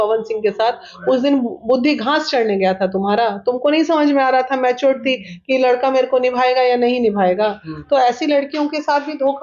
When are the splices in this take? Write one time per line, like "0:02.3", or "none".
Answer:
none